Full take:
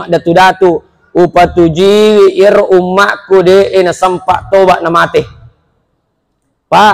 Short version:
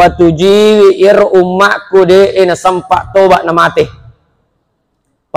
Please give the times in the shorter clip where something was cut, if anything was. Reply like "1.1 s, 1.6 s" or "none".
none